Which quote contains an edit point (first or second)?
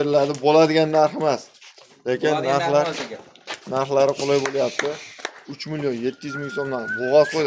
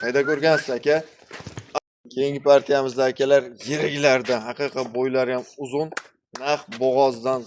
second